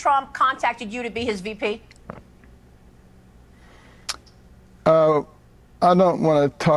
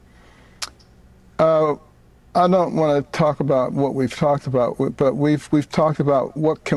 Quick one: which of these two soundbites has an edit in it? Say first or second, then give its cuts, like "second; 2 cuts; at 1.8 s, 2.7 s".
second; 1 cut; at 4.9 s